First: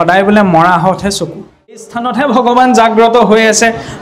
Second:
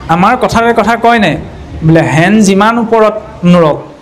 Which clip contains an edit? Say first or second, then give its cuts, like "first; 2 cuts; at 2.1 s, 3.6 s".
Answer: first; 1 cut; at 2.0 s